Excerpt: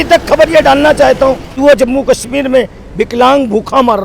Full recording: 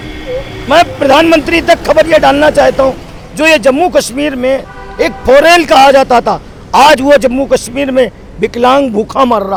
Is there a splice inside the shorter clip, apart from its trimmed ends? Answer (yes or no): yes